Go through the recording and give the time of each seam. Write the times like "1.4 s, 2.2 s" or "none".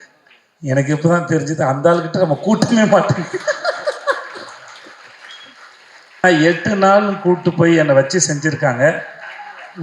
6.2 s